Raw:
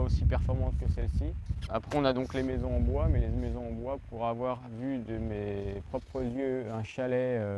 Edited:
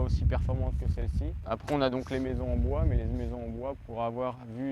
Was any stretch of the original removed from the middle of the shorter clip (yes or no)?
yes